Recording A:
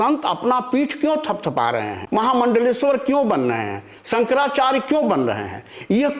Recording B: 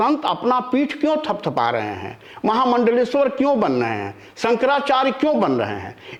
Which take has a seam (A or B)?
A